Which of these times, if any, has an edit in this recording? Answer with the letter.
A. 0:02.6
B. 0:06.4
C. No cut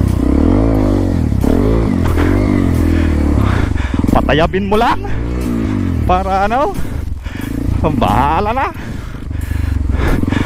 C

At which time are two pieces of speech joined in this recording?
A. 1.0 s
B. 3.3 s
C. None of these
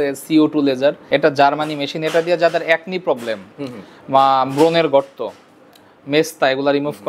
A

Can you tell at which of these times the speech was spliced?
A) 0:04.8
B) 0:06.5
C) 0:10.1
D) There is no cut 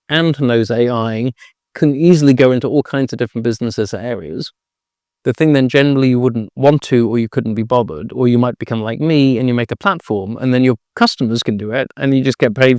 D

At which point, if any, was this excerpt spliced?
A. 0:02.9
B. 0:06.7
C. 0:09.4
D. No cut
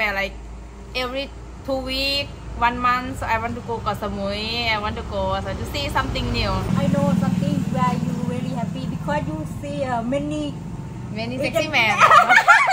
B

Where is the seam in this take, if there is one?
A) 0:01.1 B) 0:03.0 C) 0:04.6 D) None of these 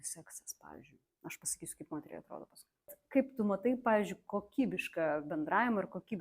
B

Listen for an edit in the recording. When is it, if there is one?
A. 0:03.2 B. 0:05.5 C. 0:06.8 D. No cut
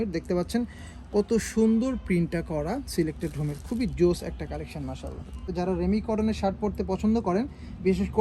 B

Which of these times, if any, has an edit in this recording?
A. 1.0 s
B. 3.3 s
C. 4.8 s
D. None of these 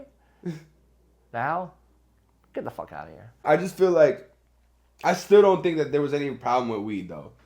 B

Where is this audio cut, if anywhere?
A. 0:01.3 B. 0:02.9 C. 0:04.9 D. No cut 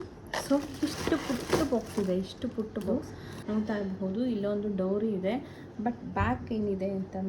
B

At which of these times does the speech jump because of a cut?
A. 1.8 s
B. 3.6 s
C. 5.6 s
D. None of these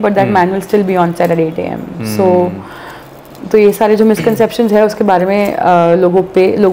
D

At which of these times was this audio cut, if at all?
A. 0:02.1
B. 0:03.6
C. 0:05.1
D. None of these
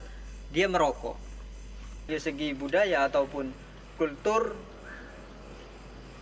A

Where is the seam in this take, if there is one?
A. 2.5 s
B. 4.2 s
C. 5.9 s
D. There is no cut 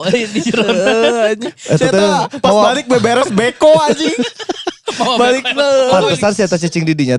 D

